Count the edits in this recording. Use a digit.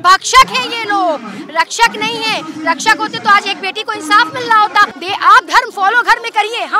1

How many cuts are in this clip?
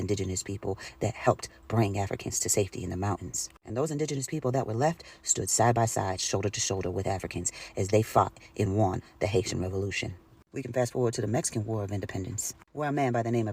0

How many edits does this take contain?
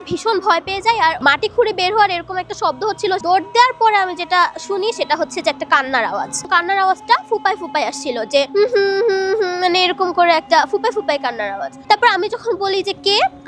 3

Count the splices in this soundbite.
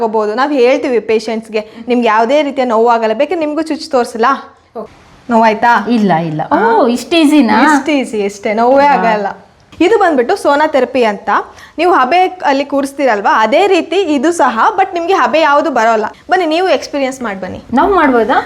3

